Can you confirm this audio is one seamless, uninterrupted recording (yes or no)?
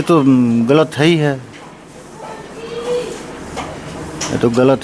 yes